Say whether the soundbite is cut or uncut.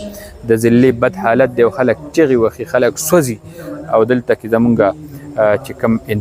uncut